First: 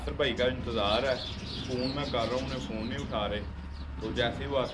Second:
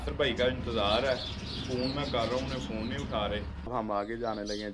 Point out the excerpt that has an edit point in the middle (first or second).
second